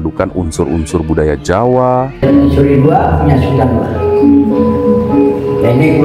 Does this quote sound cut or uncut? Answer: cut